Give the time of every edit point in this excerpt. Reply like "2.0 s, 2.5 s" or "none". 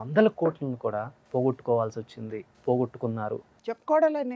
1.2 s, 2.4 s, 3.5 s